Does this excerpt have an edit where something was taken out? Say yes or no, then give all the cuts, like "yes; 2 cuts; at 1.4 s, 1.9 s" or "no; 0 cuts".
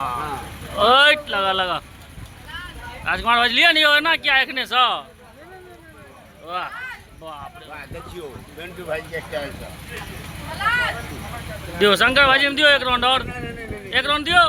no; 0 cuts